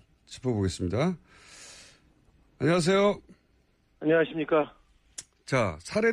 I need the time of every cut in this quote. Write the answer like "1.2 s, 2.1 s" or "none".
none